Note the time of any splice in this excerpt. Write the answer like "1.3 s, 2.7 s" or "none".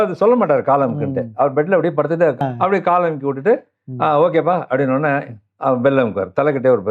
2.4 s